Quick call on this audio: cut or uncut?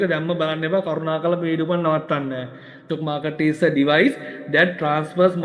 cut